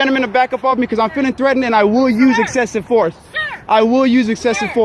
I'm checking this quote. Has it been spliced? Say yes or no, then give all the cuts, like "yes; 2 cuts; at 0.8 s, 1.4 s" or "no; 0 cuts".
no; 0 cuts